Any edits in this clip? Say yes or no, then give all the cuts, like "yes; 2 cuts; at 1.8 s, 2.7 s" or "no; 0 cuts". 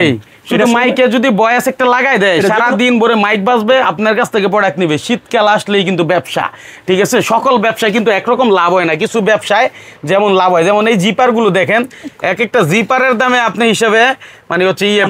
no; 0 cuts